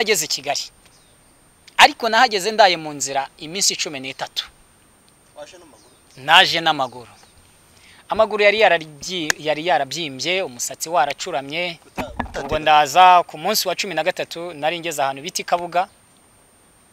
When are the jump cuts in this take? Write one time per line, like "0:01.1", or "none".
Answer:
0:12.3